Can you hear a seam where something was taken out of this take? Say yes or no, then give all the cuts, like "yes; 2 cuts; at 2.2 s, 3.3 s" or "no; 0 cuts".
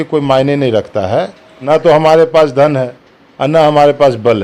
yes; 1 cut; at 1.6 s